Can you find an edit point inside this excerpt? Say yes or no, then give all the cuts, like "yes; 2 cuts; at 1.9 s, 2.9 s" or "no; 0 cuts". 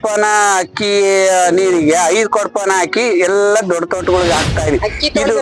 no; 0 cuts